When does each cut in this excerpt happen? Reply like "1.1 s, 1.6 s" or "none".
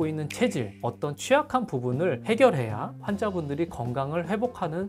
none